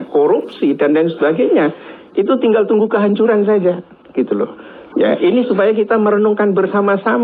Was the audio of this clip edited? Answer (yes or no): no